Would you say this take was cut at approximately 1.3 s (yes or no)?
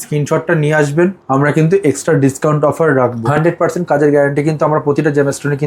no